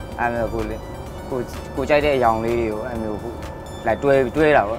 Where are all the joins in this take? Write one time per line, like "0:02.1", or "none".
none